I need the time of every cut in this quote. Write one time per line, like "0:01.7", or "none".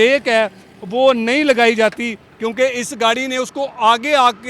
0:02.2

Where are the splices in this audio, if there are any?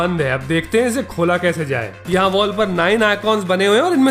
0:02.0

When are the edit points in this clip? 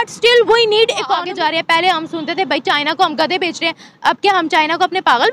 0:01.2

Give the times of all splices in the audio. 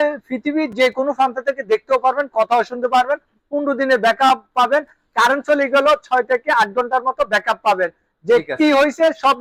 none

